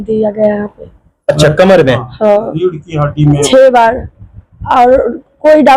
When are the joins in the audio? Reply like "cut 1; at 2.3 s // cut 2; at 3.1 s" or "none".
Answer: none